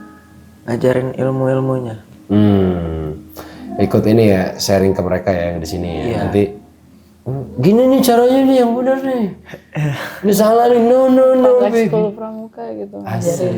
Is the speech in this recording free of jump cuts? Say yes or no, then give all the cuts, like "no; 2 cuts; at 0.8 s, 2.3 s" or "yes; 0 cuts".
yes; 0 cuts